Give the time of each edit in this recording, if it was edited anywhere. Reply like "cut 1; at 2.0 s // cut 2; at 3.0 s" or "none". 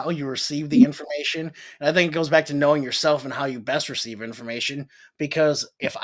none